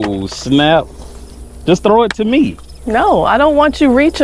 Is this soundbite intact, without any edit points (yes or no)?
yes